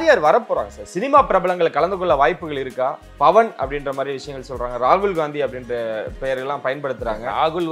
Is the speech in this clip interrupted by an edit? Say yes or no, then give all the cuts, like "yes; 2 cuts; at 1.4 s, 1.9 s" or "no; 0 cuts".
no; 0 cuts